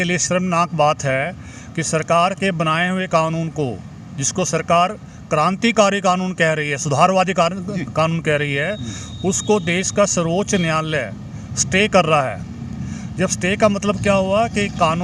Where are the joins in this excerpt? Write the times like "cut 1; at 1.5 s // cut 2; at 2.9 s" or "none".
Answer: none